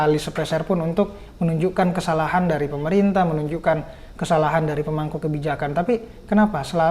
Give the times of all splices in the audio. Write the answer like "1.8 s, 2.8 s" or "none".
none